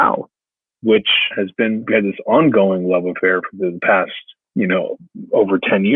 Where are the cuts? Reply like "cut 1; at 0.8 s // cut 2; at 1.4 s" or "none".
cut 1; at 1.8 s